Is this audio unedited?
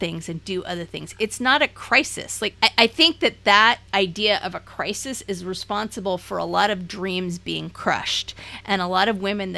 no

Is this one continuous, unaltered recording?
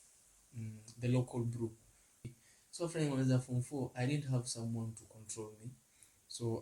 no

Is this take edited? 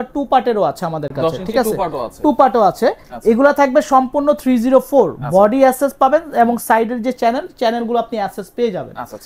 no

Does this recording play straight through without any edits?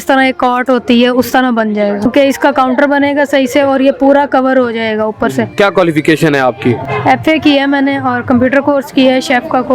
no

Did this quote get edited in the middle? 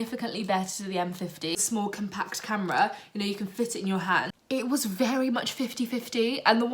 yes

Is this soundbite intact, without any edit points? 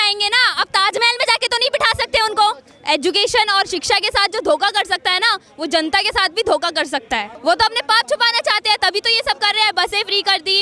no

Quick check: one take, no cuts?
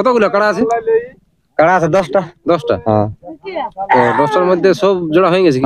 yes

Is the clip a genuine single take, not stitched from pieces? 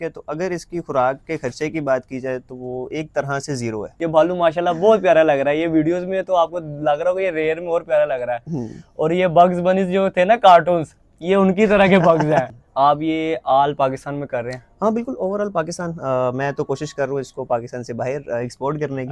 no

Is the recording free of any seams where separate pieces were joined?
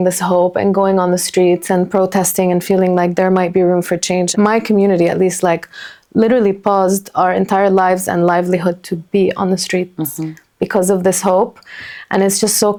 yes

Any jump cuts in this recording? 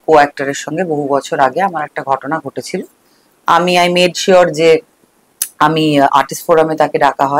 no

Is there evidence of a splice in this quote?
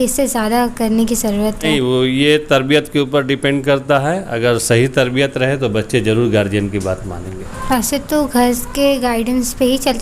yes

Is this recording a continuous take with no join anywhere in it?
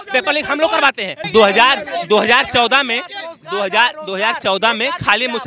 no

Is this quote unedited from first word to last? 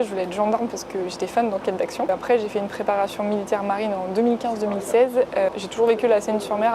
yes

